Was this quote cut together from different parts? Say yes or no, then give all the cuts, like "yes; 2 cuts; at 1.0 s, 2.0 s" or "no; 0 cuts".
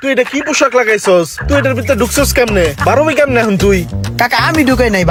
no; 0 cuts